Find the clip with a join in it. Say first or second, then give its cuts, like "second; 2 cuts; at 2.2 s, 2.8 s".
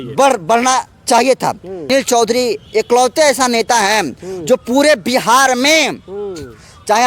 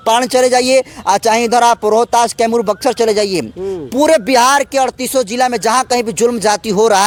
first; 1 cut; at 1.9 s